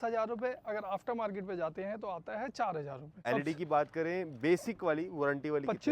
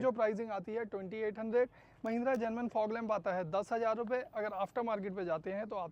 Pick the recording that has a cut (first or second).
first